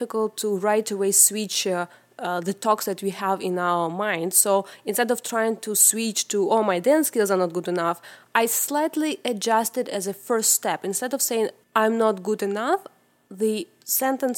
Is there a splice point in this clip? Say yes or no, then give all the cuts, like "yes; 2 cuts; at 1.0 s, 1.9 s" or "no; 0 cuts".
yes; 1 cut; at 11.6 s